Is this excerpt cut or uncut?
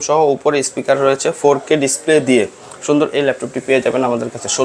uncut